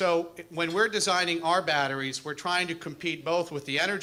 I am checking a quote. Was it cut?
no; 0 cuts

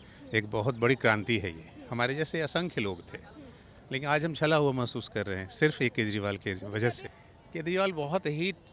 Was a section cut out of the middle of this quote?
yes; 1 cut; at 7.1 s

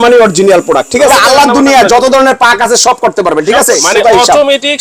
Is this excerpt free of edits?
no; 2 cuts; at 1.1 s, 3.8 s

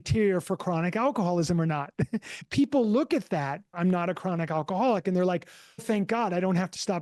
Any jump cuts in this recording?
yes; 3 cuts; at 2.3 s, 3.8 s, 5.8 s

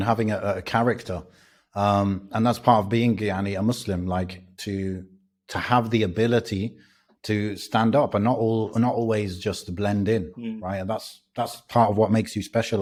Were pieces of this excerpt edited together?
no; 0 cuts

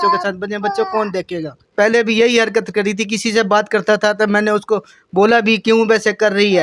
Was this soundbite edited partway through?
yes; 1 cut; at 1.6 s

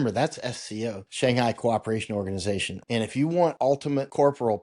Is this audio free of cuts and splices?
no; 3 cuts; at 1.0 s, 2.7 s, 3.6 s

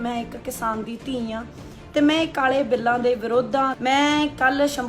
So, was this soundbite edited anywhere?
yes; 1 cut; at 3.7 s

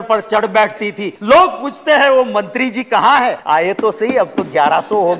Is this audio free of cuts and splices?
no; 2 cuts; at 1.1 s, 3.4 s

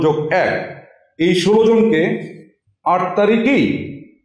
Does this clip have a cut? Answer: no; 0 cuts

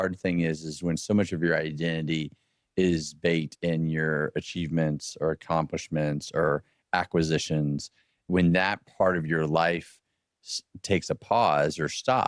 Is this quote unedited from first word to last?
yes; 0 cuts

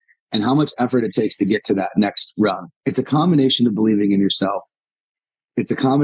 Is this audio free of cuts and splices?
no; 1 cut; at 2.7 s

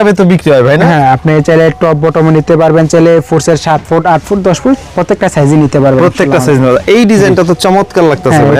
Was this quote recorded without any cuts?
yes; 0 cuts

